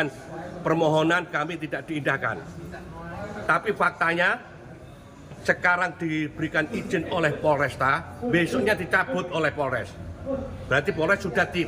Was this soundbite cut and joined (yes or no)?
no